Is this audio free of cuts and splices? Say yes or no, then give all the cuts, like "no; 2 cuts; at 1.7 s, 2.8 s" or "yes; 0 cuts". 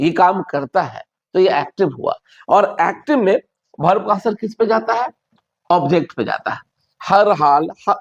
yes; 0 cuts